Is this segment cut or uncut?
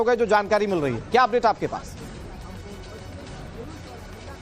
cut